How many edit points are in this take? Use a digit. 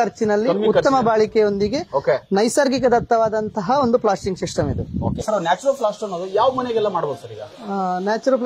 1